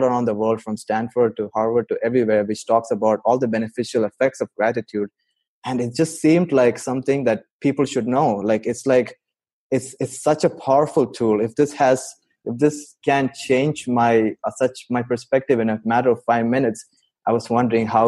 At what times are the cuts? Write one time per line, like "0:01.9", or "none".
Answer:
none